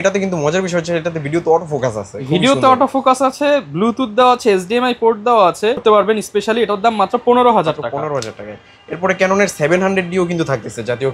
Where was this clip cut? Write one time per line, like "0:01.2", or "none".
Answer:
none